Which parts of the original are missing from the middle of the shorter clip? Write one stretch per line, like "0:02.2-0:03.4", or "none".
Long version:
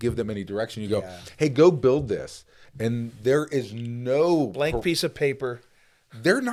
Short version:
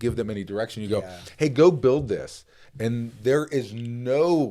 none